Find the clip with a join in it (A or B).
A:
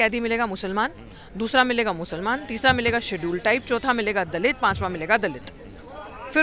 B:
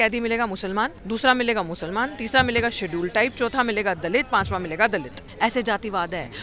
B